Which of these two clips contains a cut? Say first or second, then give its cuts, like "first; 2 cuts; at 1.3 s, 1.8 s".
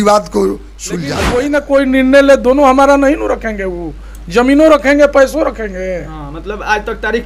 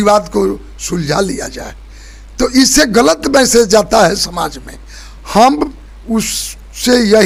first; 1 cut; at 1.3 s